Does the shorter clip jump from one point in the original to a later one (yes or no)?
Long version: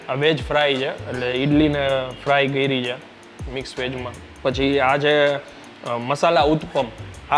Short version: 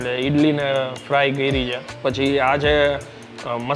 yes